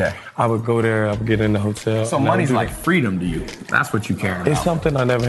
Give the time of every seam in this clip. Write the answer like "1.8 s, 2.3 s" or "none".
none